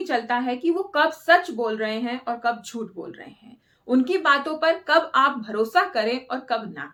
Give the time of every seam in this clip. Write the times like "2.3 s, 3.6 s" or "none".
none